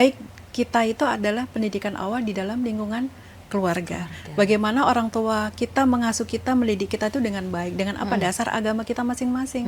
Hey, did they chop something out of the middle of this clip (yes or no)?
no